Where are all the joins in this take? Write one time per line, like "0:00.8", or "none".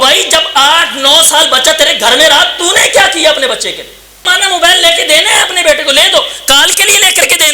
0:04.3